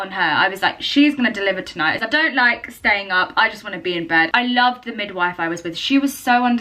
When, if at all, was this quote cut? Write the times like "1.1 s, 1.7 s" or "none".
1.9 s, 4.3 s